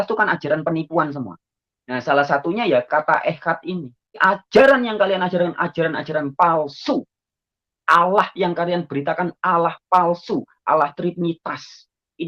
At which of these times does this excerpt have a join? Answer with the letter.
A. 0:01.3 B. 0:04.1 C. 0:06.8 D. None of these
B